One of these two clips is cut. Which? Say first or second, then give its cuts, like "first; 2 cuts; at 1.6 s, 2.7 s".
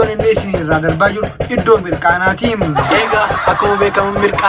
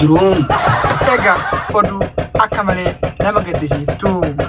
second; 1 cut; at 1.7 s